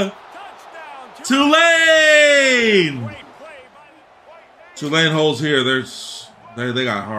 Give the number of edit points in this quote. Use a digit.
1